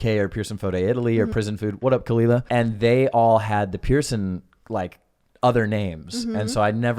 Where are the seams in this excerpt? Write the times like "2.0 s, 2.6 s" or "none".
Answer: 1.3 s, 2.5 s